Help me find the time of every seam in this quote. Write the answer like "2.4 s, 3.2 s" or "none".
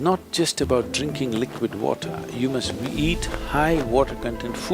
none